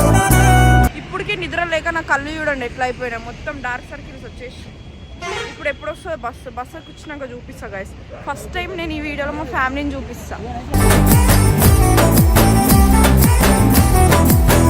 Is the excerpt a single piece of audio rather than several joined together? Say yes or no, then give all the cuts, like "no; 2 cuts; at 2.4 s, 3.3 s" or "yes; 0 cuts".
no; 1 cut; at 1.0 s